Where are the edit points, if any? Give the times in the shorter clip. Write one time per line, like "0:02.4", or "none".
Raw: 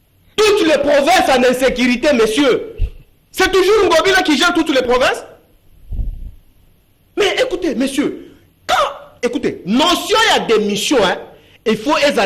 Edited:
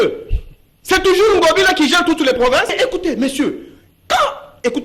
0:02.7